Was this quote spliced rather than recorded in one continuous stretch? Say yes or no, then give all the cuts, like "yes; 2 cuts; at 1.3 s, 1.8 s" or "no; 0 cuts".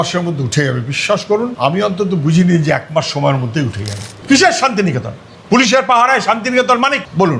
yes; 1 cut; at 4.1 s